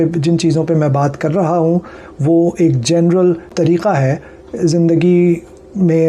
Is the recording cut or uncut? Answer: cut